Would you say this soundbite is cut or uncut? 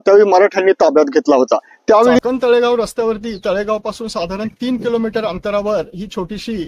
cut